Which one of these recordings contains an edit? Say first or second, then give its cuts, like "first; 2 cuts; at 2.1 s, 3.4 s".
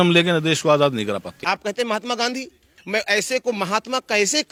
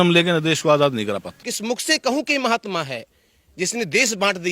second; 1 cut; at 1.4 s